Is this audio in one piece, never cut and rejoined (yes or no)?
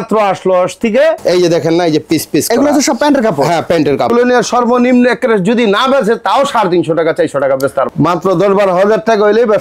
no